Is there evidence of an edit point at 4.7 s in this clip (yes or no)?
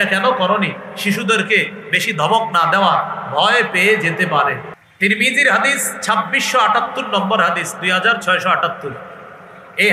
yes